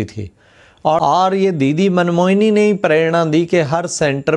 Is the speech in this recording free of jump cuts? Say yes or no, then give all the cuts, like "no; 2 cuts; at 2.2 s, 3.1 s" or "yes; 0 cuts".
no; 1 cut; at 1.0 s